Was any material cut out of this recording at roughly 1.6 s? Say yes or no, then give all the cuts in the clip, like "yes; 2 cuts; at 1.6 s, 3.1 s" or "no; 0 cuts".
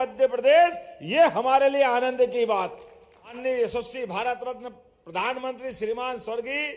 no; 1 cut; at 3.4 s